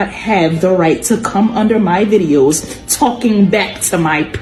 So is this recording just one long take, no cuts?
yes; 0 cuts

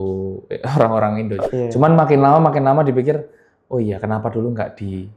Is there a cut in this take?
yes; 1 cut; at 1.4 s

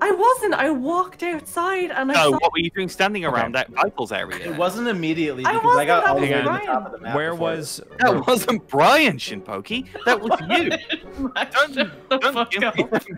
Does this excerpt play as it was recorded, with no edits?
yes; 0 cuts

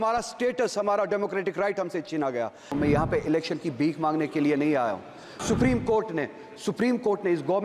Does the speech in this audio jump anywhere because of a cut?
yes; 2 cuts; at 2.7 s, 5.4 s

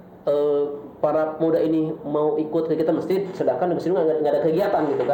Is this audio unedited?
yes; 0 cuts

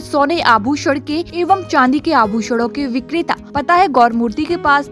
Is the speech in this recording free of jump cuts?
no; 2 cuts; at 1.3 s, 3.4 s

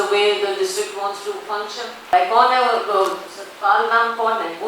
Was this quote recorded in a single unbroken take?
no; 1 cut; at 2.1 s

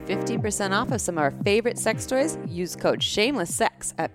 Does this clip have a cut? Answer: no; 0 cuts

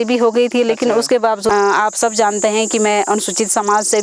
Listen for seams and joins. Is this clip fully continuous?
no; 1 cut; at 1.5 s

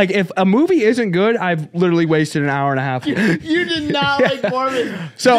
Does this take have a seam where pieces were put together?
yes; 1 cut; at 3.2 s

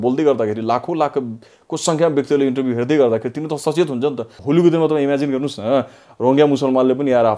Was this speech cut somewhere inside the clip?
yes; 1 cut; at 4.3 s

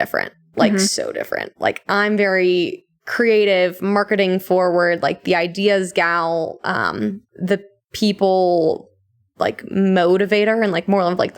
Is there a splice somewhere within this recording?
no; 0 cuts

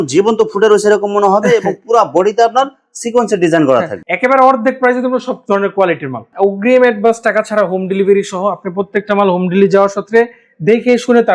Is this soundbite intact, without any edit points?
no; 1 cut; at 4.0 s

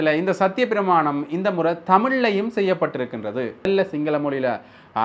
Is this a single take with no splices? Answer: no; 1 cut; at 3.7 s

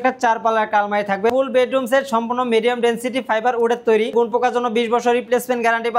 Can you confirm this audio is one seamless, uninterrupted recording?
no; 2 cuts; at 1.3 s, 4.1 s

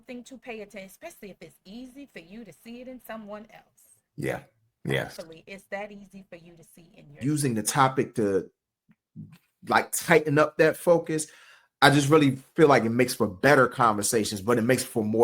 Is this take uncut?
no; 1 cut; at 7.2 s

